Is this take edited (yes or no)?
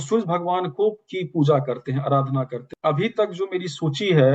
yes